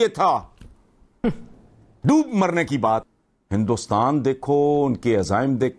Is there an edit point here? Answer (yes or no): yes